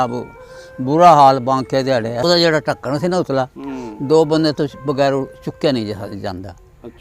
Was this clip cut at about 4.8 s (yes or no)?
no